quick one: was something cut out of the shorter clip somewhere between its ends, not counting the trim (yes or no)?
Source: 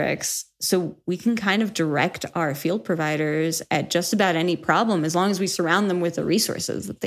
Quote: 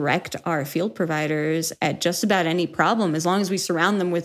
no